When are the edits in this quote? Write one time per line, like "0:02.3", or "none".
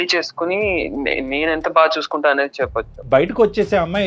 0:03.0